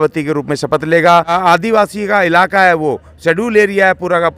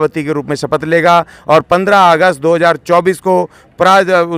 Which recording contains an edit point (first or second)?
first